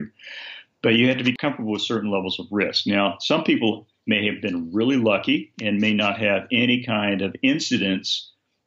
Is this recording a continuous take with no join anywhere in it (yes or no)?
yes